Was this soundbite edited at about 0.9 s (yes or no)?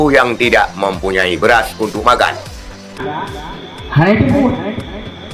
no